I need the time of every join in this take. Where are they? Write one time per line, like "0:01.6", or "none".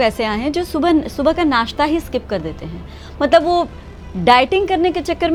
none